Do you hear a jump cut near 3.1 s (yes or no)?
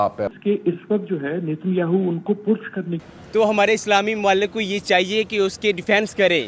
yes